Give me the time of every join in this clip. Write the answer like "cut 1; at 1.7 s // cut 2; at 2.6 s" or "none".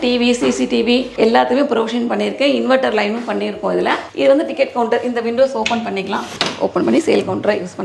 cut 1; at 1.1 s